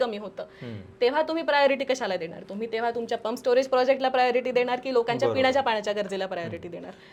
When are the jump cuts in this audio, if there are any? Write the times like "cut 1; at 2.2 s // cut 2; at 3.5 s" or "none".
none

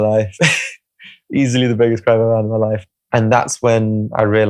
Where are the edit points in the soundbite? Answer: cut 1; at 2.8 s

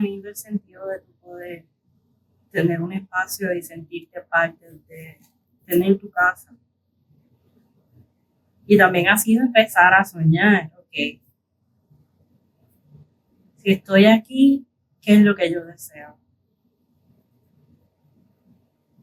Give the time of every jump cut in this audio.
cut 1; at 7.5 s

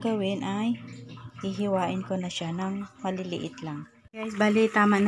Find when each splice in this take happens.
cut 1; at 4.0 s

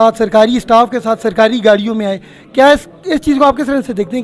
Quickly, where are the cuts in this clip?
none

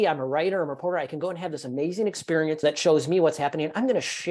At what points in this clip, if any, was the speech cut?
cut 1; at 2.6 s

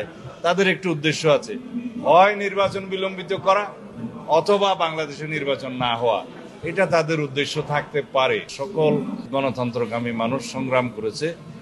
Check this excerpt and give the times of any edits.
cut 1; at 8.6 s // cut 2; at 9.2 s

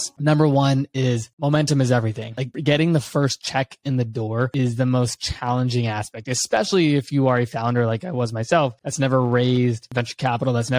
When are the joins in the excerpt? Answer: none

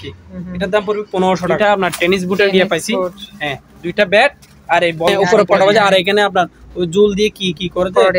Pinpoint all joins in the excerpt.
cut 1; at 1.6 s // cut 2; at 5.1 s

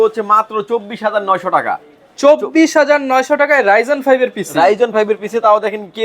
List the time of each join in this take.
none

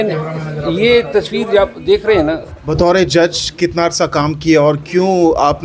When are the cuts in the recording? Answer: cut 1; at 2.5 s

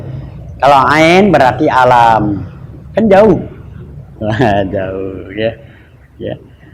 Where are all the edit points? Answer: none

